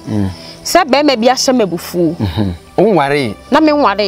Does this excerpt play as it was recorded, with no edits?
yes; 0 cuts

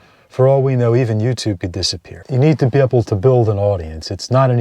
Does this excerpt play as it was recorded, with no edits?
no; 1 cut; at 2.2 s

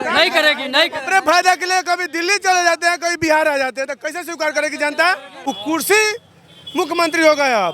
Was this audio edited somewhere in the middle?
yes; 1 cut; at 5.3 s

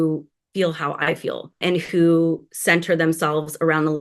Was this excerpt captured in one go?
no; 1 cut; at 1.6 s

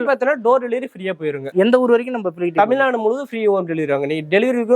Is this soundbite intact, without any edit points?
no; 1 cut; at 1.4 s

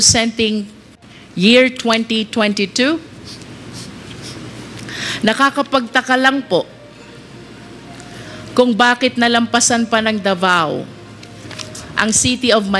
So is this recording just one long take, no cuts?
yes; 0 cuts

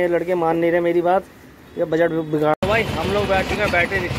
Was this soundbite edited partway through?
yes; 1 cut; at 2.5 s

